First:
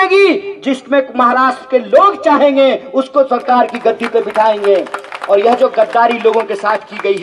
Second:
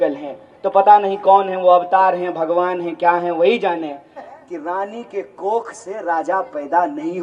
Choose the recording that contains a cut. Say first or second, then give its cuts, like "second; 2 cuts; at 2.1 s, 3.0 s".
second; 1 cut; at 4.3 s